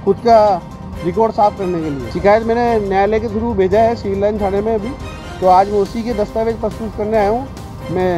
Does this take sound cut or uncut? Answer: cut